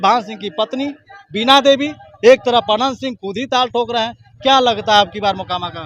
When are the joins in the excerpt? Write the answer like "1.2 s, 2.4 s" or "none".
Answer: none